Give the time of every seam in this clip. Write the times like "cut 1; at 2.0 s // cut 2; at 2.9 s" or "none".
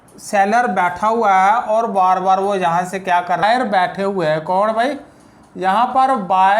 cut 1; at 3.4 s